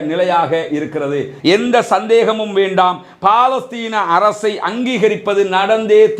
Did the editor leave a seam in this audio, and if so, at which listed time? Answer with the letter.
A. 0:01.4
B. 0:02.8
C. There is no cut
A